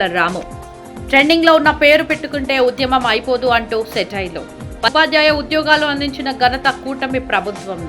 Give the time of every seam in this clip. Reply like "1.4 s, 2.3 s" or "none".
4.9 s